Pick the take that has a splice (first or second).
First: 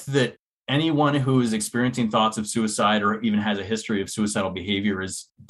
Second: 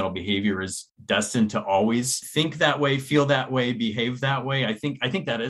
second